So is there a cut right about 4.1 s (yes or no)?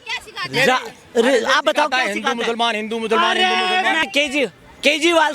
yes